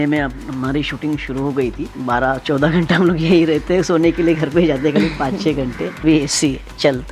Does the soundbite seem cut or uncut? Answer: cut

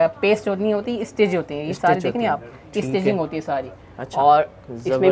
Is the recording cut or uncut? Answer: uncut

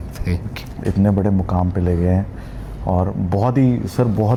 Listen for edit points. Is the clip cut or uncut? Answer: uncut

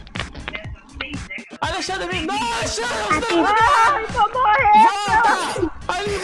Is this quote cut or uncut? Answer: uncut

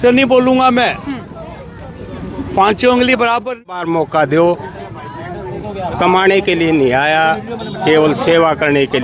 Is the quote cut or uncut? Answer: cut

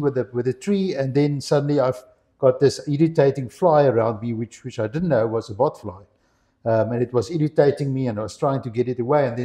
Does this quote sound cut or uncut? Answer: uncut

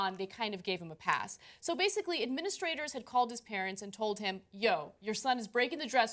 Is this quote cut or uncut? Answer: cut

